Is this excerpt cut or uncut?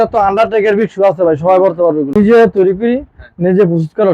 cut